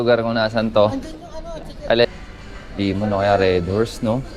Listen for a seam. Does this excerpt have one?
yes; 1 cut; at 2.0 s

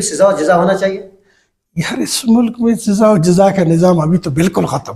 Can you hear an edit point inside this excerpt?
no; 0 cuts

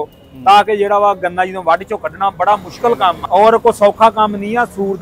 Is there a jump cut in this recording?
yes; 1 cut; at 3.2 s

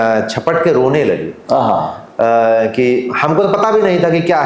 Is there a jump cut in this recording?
no; 0 cuts

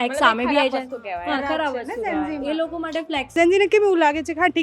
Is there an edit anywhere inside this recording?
yes; 1 cut; at 3.4 s

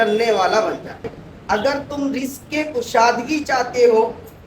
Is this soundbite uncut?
no; 1 cut; at 1.3 s

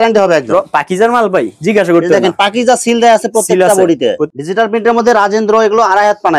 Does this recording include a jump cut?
yes; 1 cut; at 4.3 s

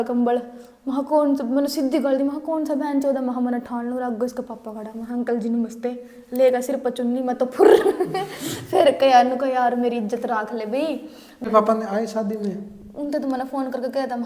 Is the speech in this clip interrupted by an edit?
yes; 1 cut; at 11.4 s

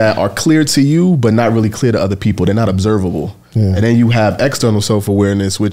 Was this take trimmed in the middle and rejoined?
no; 0 cuts

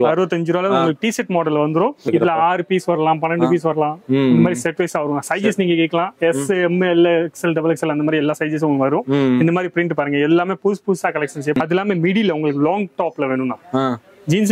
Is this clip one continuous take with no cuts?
no; 2 cuts; at 2.0 s, 11.6 s

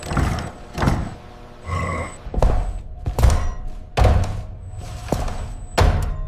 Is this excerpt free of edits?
no; 1 cut; at 2.2 s

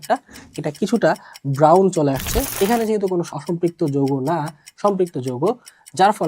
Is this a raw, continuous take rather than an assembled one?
no; 2 cuts; at 2.5 s, 3.4 s

